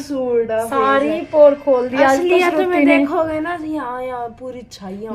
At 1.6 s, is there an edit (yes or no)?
no